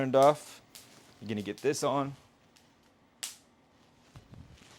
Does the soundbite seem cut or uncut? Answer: uncut